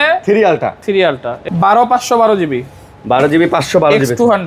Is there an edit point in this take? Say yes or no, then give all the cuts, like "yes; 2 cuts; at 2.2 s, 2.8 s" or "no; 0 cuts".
yes; 1 cut; at 1.3 s